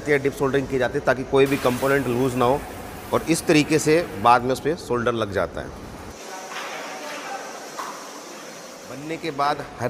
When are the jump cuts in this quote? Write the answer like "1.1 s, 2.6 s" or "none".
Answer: 6.1 s, 8.9 s